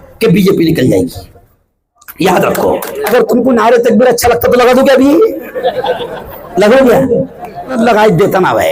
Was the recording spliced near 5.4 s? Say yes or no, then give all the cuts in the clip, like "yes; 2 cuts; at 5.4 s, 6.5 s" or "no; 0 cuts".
no; 2 cuts; at 3.0 s, 7.8 s